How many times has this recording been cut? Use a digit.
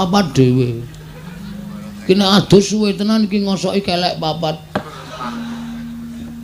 0